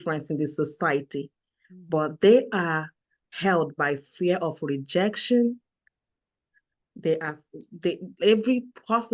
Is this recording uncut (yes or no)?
yes